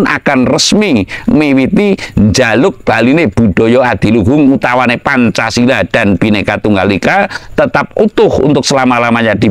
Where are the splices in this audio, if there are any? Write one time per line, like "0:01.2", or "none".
none